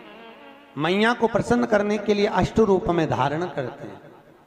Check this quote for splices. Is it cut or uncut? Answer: uncut